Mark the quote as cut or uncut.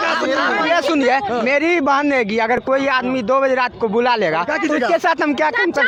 uncut